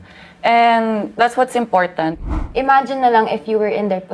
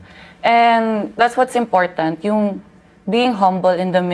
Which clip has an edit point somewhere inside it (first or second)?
first